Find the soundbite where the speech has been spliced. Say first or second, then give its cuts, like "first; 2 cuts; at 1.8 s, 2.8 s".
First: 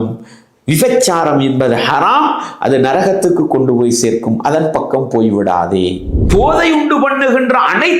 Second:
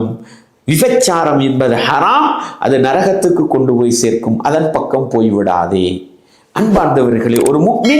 first; 1 cut; at 6.1 s